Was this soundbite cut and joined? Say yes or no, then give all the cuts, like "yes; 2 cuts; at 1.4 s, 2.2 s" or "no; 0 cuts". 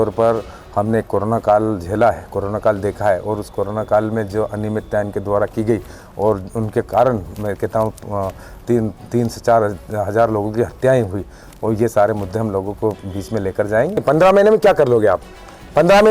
yes; 1 cut; at 14.0 s